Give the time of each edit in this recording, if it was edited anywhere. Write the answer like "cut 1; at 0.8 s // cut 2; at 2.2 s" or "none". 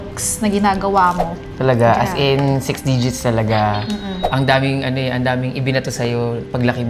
cut 1; at 1.4 s // cut 2; at 4.2 s